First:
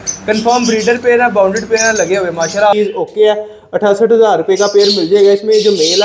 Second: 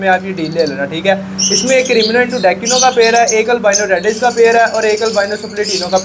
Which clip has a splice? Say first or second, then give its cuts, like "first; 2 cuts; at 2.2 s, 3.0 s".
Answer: first; 1 cut; at 2.8 s